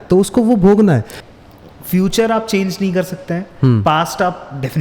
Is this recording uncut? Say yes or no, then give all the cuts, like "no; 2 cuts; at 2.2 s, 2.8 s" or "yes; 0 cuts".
no; 1 cut; at 1.1 s